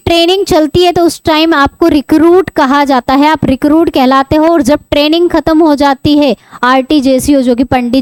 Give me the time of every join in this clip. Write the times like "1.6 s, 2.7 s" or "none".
none